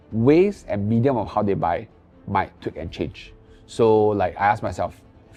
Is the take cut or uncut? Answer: uncut